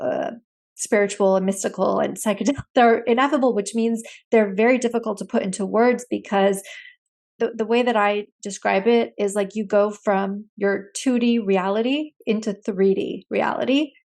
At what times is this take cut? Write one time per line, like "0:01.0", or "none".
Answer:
0:07.4